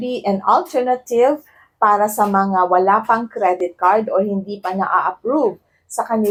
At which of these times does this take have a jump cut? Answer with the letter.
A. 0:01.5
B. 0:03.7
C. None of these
C